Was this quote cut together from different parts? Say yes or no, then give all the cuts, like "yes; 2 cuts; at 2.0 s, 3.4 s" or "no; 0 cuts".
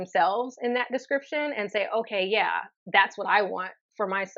no; 0 cuts